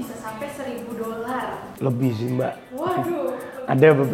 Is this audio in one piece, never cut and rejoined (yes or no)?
no